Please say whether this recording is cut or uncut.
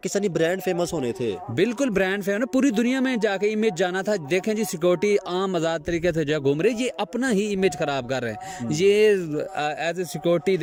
uncut